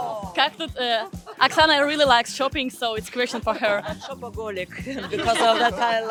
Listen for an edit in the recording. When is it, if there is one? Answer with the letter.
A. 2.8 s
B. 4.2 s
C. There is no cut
C